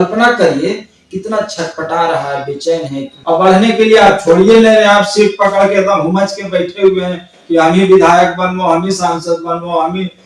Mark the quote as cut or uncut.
cut